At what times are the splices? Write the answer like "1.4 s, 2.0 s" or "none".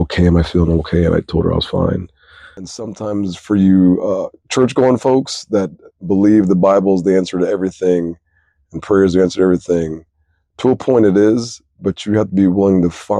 2.7 s